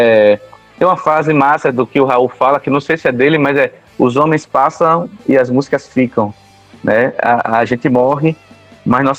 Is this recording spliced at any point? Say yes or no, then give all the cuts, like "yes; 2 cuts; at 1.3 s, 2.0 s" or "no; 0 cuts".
no; 0 cuts